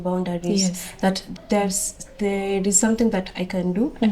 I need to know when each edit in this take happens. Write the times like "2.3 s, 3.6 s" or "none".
1.2 s